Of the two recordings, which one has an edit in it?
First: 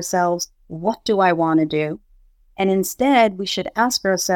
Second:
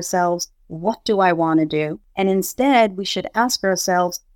second; 1 cut; at 2.0 s

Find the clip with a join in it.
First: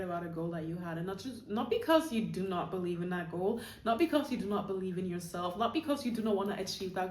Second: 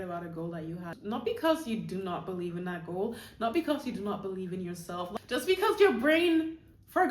second; 2 cuts; at 0.9 s, 5.1 s

